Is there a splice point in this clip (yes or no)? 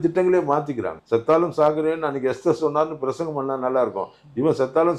yes